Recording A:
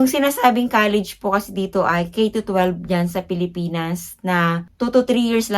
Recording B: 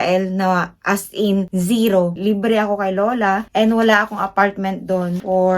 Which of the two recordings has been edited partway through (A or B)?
B